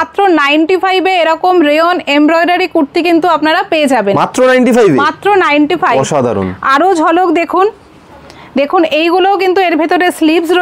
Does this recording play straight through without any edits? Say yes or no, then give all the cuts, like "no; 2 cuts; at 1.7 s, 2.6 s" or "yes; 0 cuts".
yes; 0 cuts